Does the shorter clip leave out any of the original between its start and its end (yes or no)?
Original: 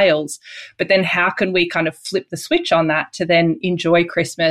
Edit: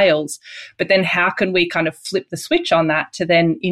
no